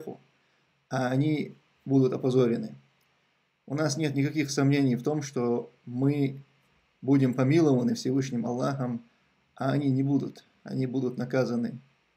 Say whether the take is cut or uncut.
uncut